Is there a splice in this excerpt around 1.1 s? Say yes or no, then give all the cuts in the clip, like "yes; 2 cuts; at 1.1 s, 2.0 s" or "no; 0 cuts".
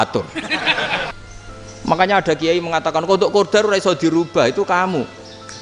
yes; 1 cut; at 1.1 s